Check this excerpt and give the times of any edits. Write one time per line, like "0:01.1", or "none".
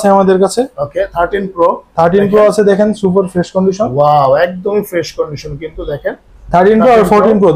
none